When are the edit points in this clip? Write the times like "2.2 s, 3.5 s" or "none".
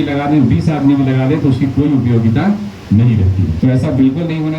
3.5 s